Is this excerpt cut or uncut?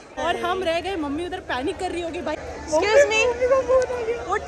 cut